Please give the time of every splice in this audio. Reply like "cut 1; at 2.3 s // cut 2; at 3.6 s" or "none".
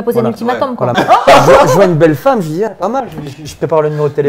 cut 1; at 0.9 s